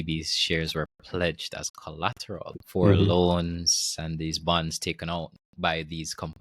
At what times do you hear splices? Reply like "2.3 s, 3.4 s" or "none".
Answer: none